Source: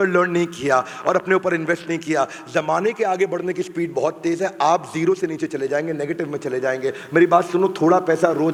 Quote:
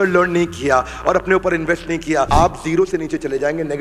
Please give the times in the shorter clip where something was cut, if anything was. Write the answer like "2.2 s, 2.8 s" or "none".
2.3 s